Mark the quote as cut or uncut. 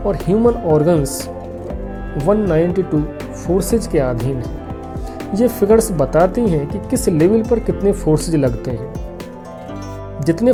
uncut